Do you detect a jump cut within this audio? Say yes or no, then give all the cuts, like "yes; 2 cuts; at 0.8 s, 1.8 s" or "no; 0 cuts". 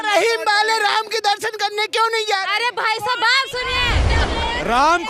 yes; 1 cut; at 4.1 s